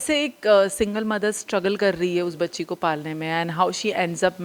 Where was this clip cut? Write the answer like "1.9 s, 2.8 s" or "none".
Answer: none